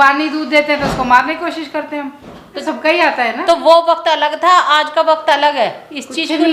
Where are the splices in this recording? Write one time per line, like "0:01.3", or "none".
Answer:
0:02.6

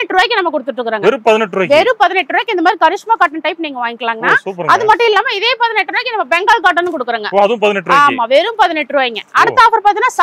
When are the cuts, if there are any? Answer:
none

